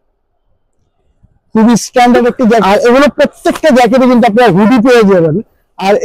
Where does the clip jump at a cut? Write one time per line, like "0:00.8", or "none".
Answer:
0:02.6